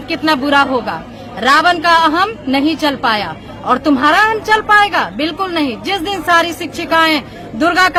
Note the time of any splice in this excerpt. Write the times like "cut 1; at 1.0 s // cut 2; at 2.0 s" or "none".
none

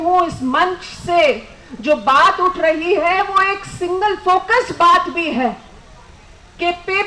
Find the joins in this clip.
none

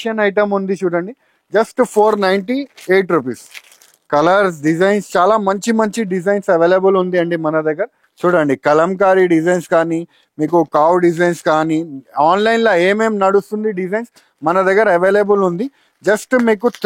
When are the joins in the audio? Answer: none

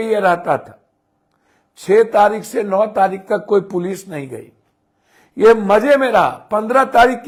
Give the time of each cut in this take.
none

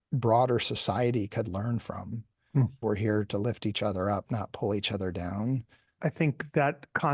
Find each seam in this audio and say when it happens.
cut 1; at 2.8 s // cut 2; at 5.9 s

